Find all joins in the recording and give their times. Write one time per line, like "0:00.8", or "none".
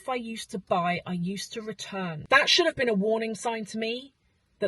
0:02.2